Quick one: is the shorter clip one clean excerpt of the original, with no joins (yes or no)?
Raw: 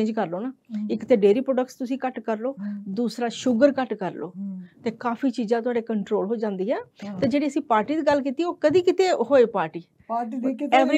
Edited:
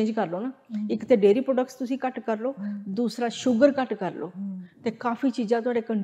yes